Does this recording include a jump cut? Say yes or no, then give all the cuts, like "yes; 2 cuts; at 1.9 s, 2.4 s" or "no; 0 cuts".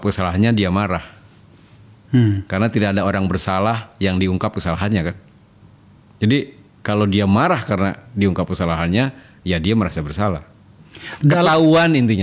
no; 0 cuts